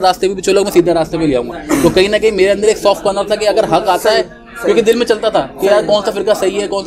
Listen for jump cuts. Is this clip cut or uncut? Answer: uncut